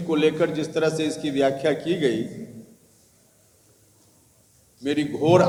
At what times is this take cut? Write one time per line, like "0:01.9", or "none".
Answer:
none